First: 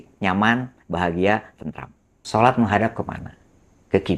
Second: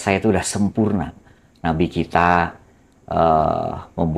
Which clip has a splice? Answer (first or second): first